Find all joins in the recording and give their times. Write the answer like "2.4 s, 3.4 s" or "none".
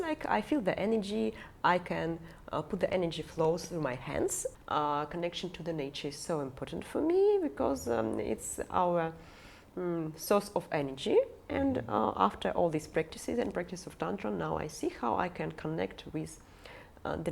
4.5 s